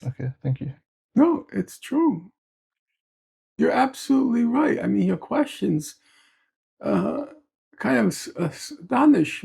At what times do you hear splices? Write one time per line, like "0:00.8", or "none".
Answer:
none